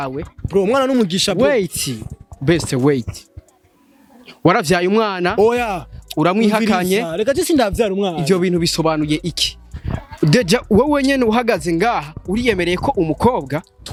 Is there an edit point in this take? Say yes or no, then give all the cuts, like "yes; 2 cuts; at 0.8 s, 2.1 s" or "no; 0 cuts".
no; 0 cuts